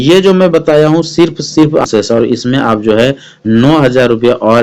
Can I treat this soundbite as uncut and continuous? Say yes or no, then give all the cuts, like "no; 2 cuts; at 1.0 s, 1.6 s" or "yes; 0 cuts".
no; 1 cut; at 1.9 s